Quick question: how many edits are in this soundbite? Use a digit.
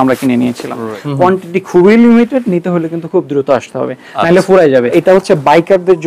2